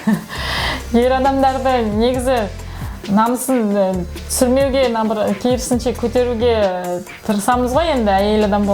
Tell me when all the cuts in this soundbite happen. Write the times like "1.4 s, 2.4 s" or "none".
none